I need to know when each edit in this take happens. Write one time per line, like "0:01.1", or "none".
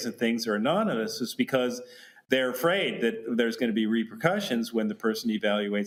none